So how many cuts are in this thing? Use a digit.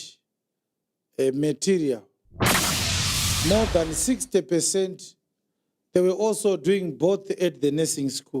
0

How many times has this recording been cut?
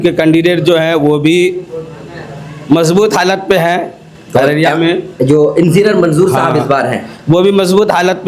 0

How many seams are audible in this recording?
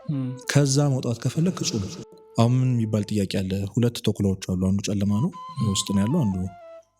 1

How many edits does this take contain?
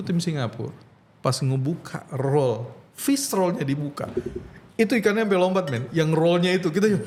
0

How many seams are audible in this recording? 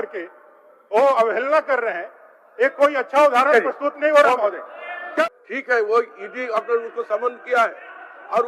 1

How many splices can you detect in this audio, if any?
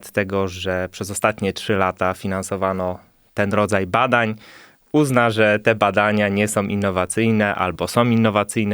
0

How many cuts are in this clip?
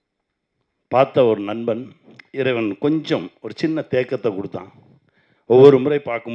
0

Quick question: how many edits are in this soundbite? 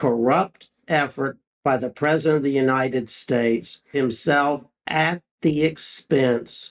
2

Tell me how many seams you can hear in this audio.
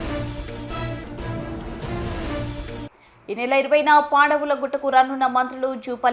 1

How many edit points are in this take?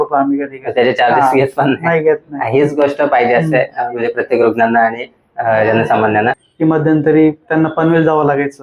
1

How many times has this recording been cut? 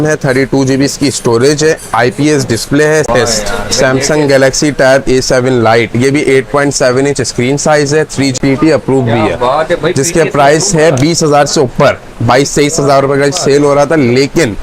2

